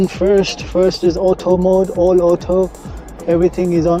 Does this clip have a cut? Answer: no; 0 cuts

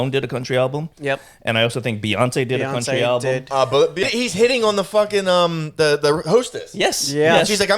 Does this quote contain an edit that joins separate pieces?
yes; 1 cut; at 4.0 s

